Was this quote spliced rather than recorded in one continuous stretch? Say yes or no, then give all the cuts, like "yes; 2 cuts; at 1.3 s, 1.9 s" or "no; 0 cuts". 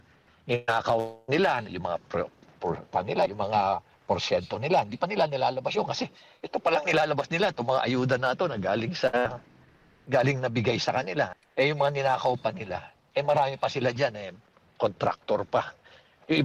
yes; 2 cuts; at 11.4 s, 13.4 s